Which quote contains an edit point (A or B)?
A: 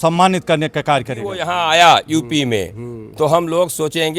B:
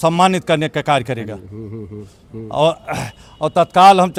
A